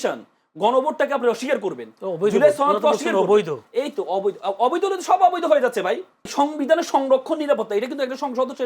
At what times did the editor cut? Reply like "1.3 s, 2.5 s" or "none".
6.2 s